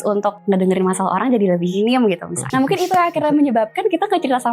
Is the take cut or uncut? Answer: cut